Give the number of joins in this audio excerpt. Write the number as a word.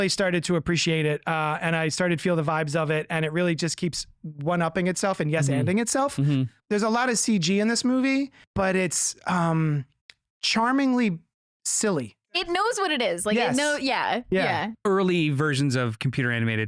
four